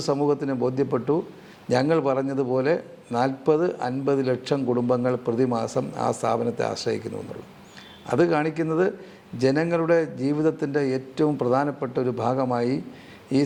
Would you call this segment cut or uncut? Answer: uncut